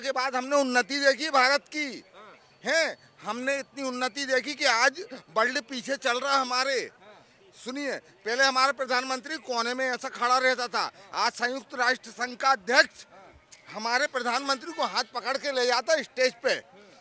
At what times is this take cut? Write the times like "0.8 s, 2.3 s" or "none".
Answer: none